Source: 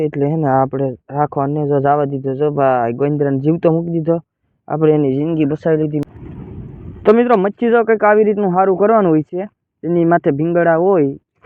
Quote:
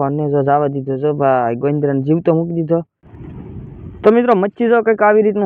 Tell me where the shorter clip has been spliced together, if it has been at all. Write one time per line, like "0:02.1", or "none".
0:03.2